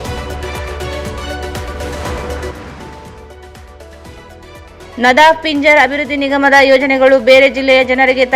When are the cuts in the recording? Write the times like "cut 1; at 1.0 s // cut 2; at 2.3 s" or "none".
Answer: cut 1; at 2.3 s